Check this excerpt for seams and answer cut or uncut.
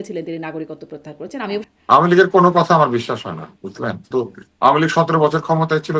cut